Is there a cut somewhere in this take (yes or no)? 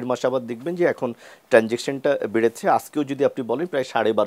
no